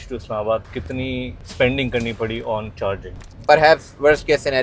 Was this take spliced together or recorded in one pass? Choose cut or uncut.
cut